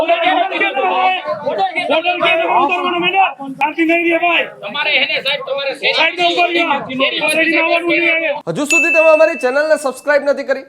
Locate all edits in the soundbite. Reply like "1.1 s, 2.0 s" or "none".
3.4 s, 8.4 s